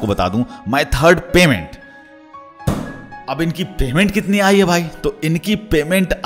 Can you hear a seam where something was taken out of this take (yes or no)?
no